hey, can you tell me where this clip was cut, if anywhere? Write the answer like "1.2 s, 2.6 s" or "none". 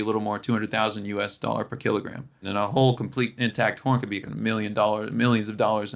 2.4 s, 4.3 s